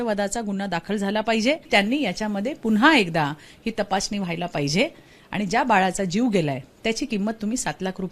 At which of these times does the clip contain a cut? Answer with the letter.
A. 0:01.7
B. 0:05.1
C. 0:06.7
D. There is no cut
A